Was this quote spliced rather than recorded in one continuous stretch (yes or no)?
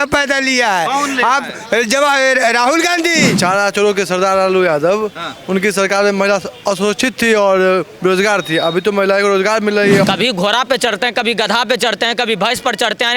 yes